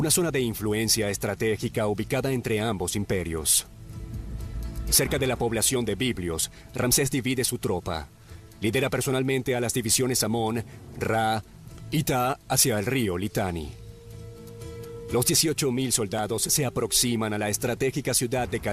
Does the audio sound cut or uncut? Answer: cut